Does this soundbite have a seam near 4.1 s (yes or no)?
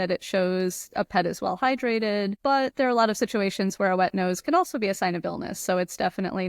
no